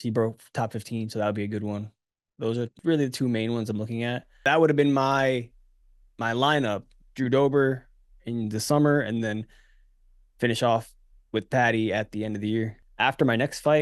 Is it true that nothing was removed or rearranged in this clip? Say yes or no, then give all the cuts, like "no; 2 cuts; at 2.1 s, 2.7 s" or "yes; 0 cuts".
no; 3 cuts; at 2.7 s, 4.4 s, 12.8 s